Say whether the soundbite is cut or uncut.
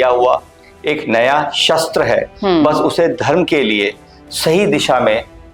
uncut